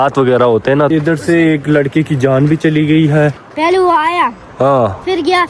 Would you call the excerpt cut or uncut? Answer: cut